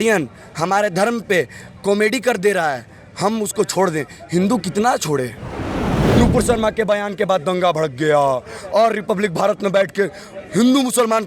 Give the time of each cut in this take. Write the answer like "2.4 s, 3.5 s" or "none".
6.0 s